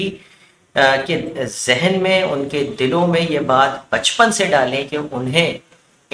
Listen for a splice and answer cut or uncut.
uncut